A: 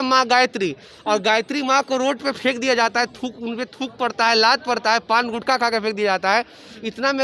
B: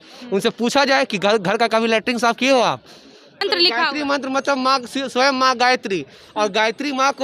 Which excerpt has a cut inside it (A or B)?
B